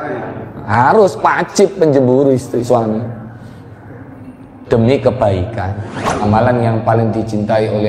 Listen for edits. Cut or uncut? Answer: cut